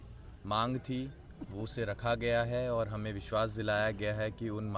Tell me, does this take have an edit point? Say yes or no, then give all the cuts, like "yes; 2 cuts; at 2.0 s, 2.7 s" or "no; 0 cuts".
no; 0 cuts